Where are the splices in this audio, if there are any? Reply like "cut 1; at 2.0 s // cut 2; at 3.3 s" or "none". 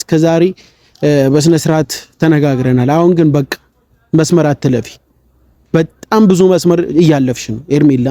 none